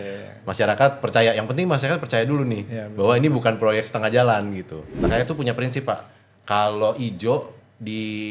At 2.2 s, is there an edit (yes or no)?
no